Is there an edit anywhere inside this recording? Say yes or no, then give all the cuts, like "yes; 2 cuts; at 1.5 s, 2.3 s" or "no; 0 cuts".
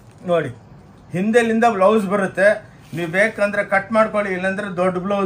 no; 0 cuts